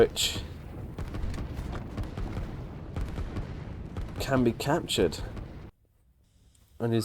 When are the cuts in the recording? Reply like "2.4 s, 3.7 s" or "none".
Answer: 5.7 s